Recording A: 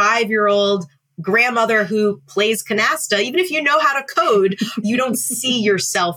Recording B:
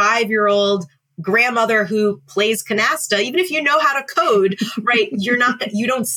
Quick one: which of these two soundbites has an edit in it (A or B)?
A